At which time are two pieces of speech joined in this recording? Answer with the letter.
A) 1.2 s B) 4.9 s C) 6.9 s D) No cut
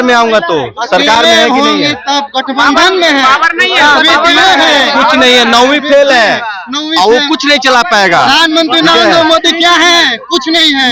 D